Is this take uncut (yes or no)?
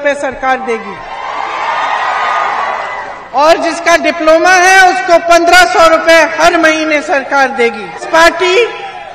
no